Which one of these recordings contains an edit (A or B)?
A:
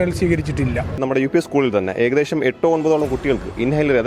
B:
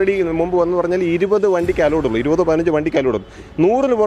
A